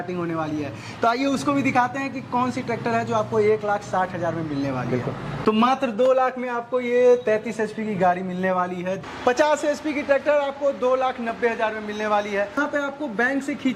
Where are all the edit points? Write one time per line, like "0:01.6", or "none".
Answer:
0:05.4
0:09.0
0:12.6

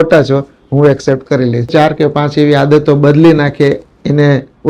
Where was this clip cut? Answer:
0:01.7

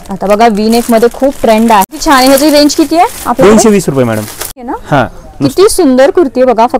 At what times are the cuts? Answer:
0:02.0
0:04.6

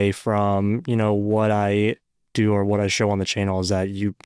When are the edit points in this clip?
none

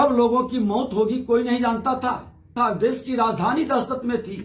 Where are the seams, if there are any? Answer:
0:02.5

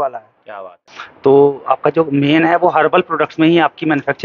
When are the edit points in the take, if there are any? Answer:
0:00.9

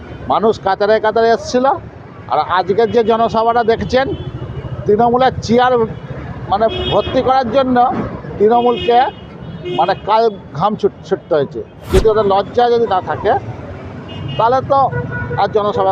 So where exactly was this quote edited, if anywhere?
0:11.9

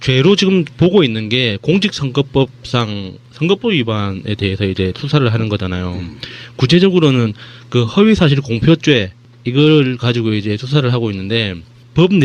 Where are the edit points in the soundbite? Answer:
0:10.9

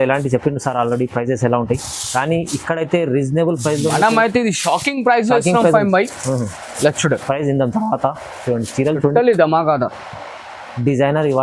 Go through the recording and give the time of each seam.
none

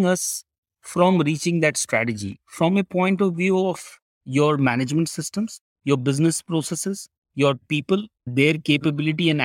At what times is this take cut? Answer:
none

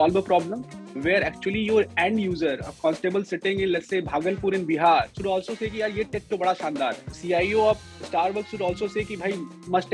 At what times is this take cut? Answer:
0:05.1
0:07.1

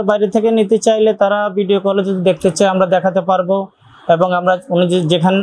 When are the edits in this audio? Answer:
none

